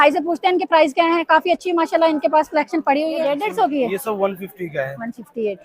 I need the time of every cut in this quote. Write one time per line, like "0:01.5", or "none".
0:03.4